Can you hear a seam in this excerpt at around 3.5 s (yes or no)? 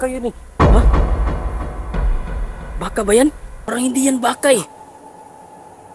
yes